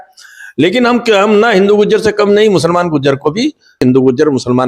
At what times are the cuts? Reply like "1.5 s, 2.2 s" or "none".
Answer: 3.8 s